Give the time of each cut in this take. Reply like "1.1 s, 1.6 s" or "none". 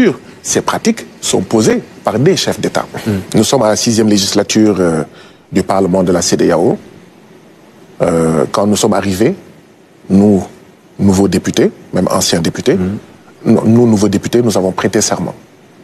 3.2 s